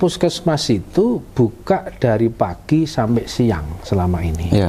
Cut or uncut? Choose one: uncut